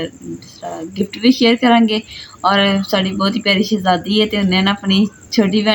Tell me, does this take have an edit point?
no; 0 cuts

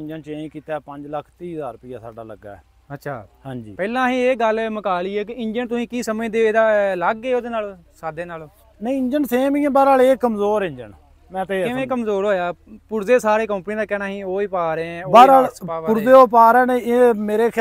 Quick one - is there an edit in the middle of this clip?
no; 0 cuts

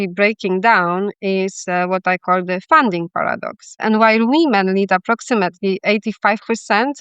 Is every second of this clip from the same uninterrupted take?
no; 1 cut; at 3.8 s

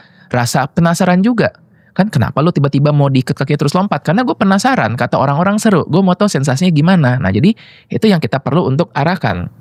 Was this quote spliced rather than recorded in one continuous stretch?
no; 0 cuts

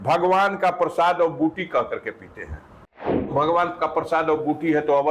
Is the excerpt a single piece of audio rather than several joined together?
no; 1 cut; at 3.3 s

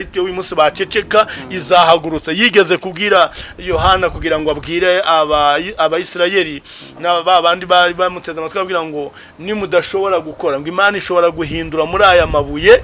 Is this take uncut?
yes; 0 cuts

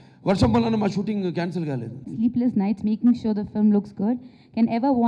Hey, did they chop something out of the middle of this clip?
yes; 1 cut; at 2.0 s

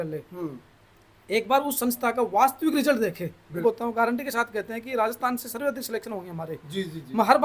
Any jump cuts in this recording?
yes; 1 cut; at 3.5 s

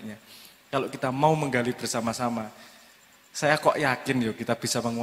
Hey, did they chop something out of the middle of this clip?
no; 0 cuts

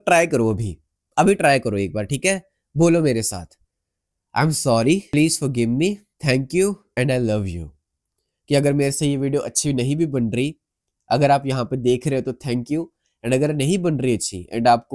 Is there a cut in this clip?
yes; 3 cuts; at 5.1 s, 6.1 s, 6.8 s

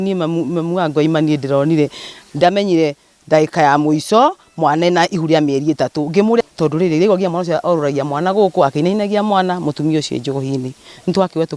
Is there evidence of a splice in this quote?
yes; 1 cut; at 6.4 s

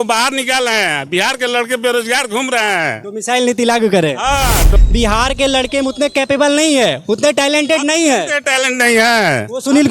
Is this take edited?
yes; 1 cut; at 4.7 s

